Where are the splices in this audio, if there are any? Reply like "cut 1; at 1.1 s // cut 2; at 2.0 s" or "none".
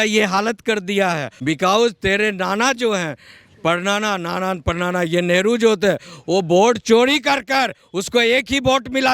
cut 1; at 1.3 s